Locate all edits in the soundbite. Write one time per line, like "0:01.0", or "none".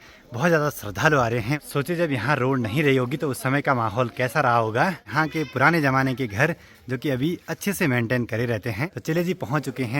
0:01.6
0:05.1
0:08.8